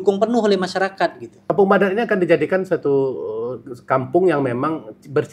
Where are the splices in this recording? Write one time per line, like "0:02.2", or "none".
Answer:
0:01.3